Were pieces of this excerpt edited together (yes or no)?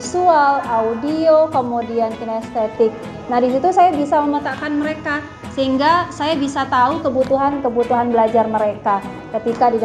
no